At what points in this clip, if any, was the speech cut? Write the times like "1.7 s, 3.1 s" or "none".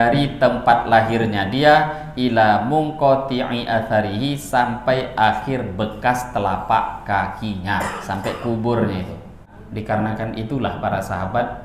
9.5 s